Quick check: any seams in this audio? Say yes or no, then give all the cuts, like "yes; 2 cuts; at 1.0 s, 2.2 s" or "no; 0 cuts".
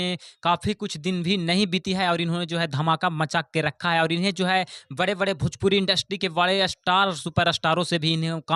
no; 0 cuts